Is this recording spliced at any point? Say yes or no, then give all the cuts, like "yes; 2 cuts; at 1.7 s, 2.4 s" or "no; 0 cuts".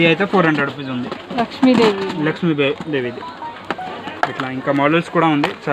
no; 0 cuts